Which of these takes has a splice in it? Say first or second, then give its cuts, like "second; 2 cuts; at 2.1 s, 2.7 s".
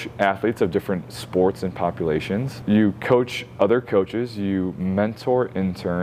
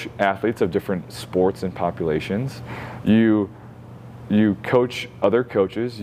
first; 1 cut; at 2.5 s